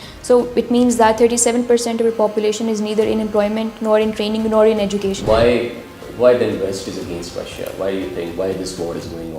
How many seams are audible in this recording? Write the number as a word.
one